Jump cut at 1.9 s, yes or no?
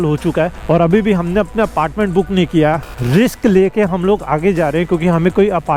no